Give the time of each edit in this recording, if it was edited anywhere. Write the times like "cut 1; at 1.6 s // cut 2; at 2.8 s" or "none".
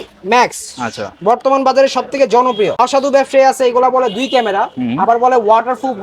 cut 1; at 2.8 s